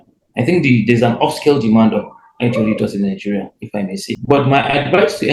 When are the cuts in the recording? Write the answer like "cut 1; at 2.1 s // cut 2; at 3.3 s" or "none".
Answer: cut 1; at 4.1 s